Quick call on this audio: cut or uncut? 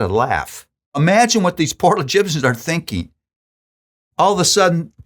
cut